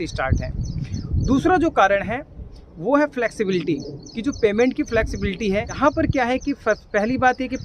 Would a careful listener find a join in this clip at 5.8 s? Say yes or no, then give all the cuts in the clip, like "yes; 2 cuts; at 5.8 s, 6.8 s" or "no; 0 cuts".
yes; 1 cut; at 5.8 s